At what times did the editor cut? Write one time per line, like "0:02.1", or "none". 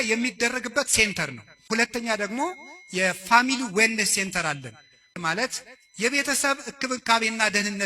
0:01.6
0:05.1